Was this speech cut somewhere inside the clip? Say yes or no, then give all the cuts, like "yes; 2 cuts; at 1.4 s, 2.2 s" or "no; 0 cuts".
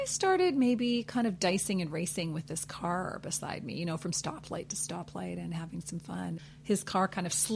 yes; 1 cut; at 6.4 s